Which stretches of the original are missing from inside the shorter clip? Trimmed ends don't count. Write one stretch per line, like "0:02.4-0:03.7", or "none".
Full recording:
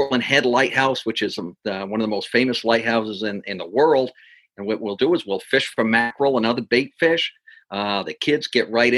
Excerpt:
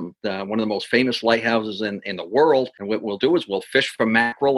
0:04.2-0:04.5

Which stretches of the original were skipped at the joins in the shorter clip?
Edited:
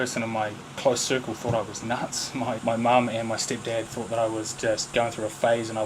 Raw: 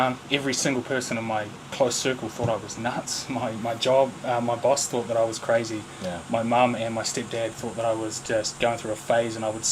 0:03.5-0:06.2

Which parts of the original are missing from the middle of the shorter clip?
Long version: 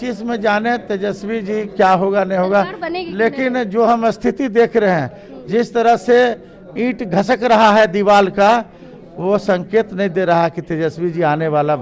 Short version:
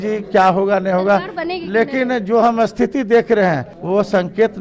0:05.2-0:09.1

